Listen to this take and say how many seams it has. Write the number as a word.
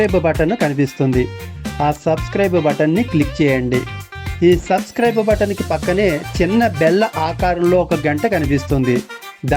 zero